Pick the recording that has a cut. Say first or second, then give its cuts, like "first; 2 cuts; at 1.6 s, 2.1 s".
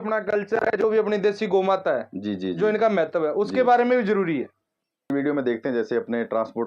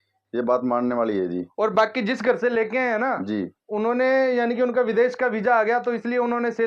first; 1 cut; at 5.1 s